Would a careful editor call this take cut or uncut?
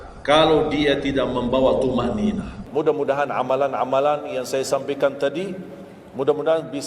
cut